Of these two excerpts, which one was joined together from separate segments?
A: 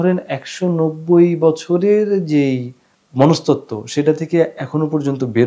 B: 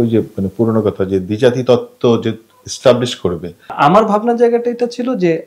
B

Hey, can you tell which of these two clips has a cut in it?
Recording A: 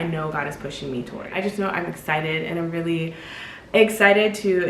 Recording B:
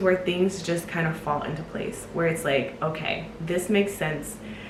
A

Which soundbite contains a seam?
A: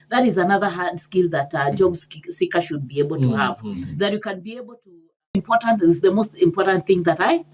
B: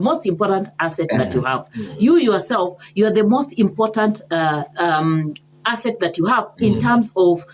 A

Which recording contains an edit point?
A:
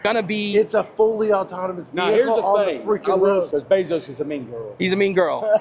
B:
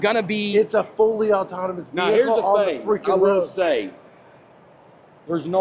A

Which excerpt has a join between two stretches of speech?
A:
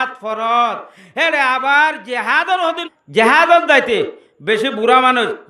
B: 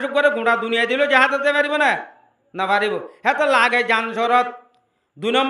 A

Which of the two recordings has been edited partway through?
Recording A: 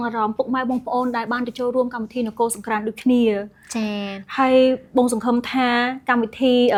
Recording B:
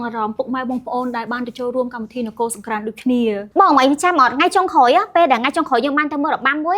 B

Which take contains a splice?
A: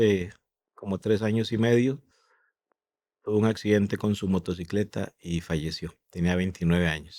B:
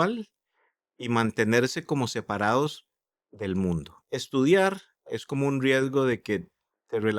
B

